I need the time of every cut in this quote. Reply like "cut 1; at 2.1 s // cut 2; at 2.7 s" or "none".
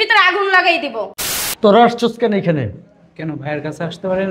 cut 1; at 1.1 s